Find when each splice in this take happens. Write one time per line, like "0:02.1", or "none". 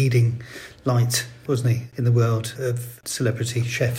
0:01.6
0:02.8